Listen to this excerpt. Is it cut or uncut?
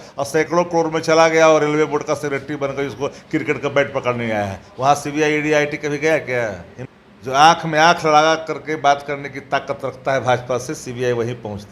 cut